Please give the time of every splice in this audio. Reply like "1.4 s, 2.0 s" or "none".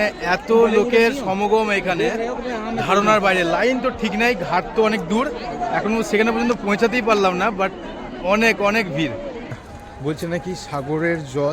9.5 s